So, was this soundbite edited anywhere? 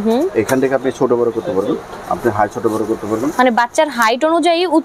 no; 0 cuts

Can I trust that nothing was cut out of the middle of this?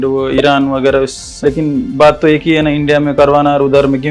no; 1 cut; at 1.3 s

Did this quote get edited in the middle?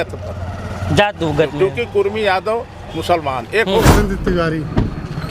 yes; 1 cut; at 3.9 s

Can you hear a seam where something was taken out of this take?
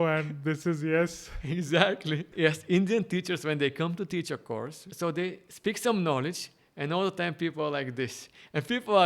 yes; 2 cuts; at 2.3 s, 4.9 s

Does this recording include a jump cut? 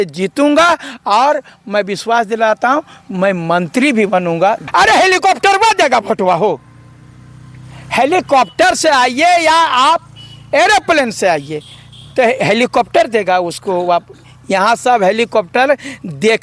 yes; 1 cut; at 4.6 s

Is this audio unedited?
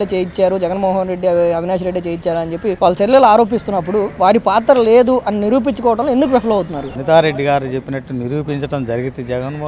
no; 1 cut; at 6.8 s

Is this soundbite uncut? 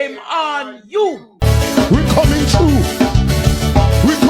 no; 1 cut; at 1.3 s

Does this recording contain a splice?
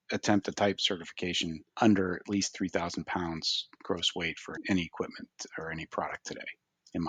no; 0 cuts

